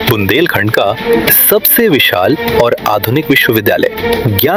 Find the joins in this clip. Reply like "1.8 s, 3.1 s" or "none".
none